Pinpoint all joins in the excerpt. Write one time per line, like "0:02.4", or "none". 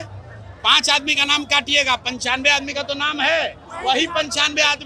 none